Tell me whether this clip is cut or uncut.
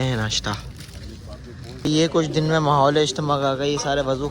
cut